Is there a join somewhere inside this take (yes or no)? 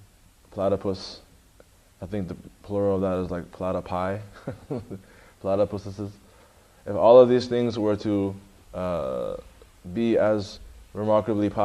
yes